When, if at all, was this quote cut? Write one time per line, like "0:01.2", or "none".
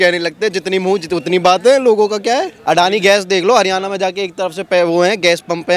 0:02.5